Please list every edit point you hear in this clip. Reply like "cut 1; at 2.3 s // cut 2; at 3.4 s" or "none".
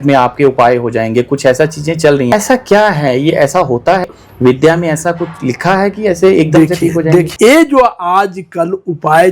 cut 1; at 2.3 s // cut 2; at 4.0 s // cut 3; at 7.3 s